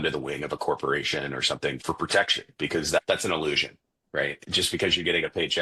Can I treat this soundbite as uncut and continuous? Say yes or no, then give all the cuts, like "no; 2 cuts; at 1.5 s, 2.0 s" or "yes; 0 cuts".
no; 3 cuts; at 1.8 s, 3.0 s, 4.4 s